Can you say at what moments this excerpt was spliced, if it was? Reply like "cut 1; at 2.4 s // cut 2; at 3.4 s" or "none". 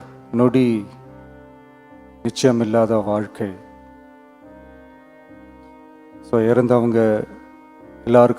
cut 1; at 0.9 s // cut 2; at 2.2 s // cut 3; at 3.6 s // cut 4; at 6.3 s